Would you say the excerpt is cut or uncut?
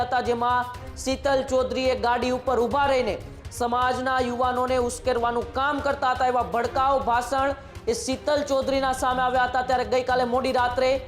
uncut